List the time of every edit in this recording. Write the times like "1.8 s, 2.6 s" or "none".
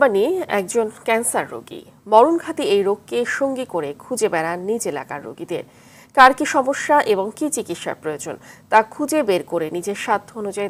none